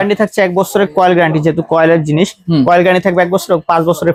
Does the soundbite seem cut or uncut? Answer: uncut